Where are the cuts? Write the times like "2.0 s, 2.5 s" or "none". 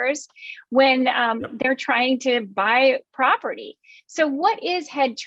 none